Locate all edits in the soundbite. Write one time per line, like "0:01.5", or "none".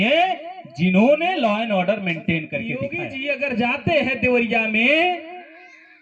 0:02.9

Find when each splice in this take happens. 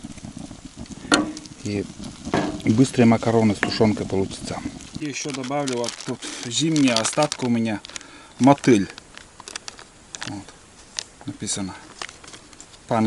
0:05.0

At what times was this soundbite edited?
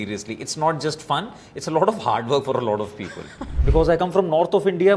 0:03.5

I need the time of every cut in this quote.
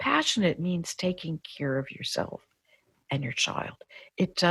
0:02.8

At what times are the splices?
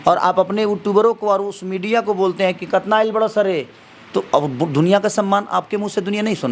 none

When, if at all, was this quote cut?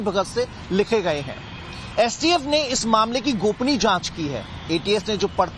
none

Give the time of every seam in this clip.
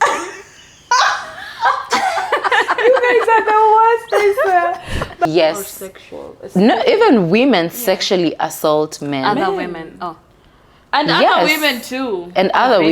0:05.2

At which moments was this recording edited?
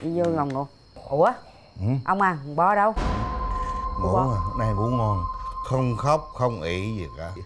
none

